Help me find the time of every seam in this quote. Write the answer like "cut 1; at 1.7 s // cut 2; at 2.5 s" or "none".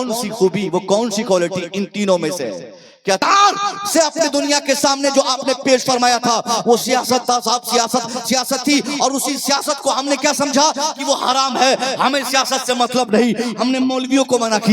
cut 1; at 3.2 s